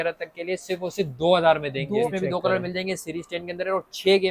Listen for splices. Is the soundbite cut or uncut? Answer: cut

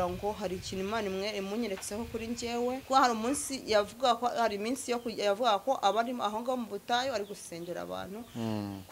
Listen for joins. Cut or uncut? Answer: cut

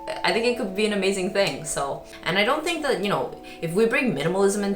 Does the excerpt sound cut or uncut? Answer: cut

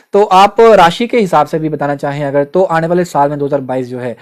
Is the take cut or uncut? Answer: uncut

